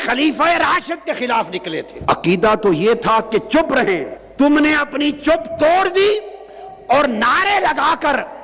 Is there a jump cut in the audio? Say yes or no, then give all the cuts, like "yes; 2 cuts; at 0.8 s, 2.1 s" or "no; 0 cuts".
yes; 2 cuts; at 1.9 s, 4.2 s